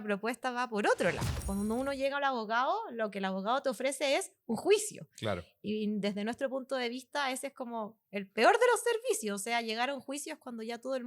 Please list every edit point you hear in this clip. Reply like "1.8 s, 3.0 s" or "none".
1.3 s